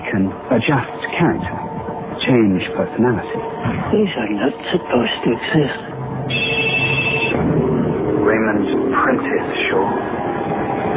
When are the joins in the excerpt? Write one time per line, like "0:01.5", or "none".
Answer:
0:04.6